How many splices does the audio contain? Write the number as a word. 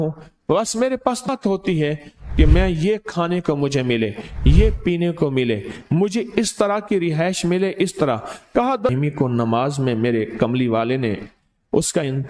two